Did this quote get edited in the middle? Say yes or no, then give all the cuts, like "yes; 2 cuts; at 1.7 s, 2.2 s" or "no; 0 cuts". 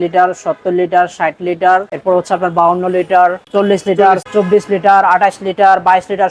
yes; 2 cuts; at 1.9 s, 4.2 s